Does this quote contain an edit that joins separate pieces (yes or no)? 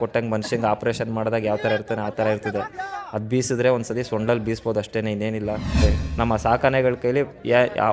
yes